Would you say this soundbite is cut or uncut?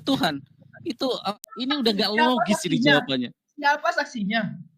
cut